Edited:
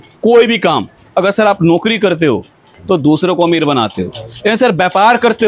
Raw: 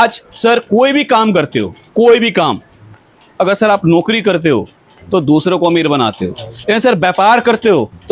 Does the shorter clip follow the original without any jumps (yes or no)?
no